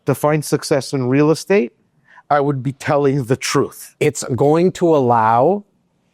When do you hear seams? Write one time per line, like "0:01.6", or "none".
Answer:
0:03.8